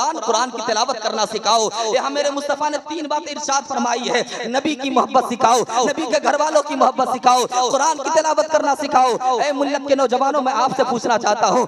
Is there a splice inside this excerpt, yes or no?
no